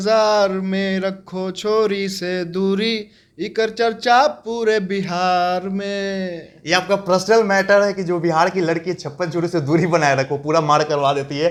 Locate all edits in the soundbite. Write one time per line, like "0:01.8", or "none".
none